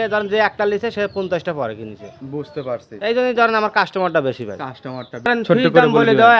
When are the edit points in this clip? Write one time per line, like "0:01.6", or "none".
0:05.3